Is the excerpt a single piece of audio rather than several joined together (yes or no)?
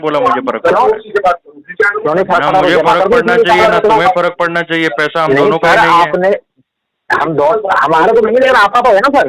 yes